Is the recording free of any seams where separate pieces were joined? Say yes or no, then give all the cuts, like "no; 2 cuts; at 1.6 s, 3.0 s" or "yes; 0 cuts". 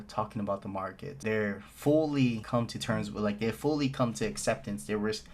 no; 2 cuts; at 1.1 s, 2.4 s